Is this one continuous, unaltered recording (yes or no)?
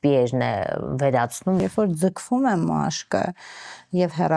no